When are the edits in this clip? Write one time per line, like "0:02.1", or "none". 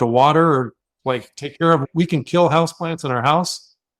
0:01.8